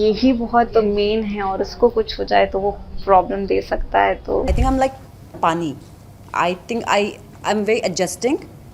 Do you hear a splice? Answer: yes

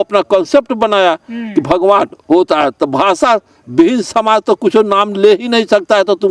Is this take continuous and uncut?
yes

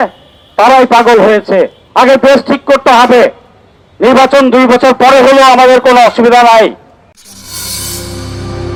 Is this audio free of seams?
yes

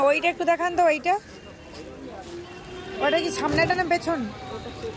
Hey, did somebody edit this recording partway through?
no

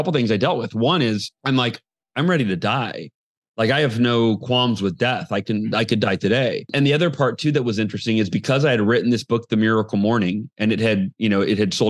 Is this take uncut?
no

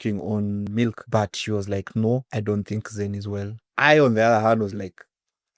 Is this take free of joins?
no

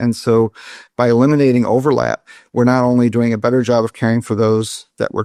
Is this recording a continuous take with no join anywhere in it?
yes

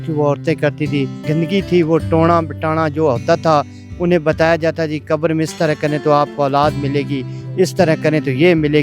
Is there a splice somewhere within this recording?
yes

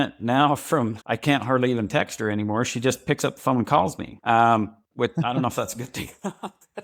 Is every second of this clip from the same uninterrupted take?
yes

